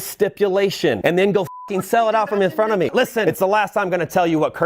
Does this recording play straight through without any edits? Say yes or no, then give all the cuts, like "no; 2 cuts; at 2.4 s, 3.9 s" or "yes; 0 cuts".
no; 2 cuts; at 1.0 s, 3.2 s